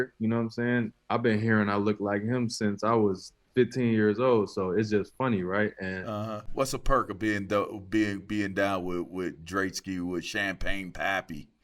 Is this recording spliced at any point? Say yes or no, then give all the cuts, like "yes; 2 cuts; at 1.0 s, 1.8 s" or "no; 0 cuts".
yes; 1 cut; at 6.4 s